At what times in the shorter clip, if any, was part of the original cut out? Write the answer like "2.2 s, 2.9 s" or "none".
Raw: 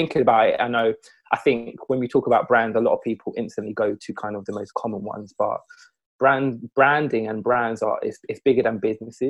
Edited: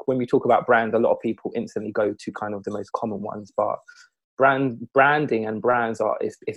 none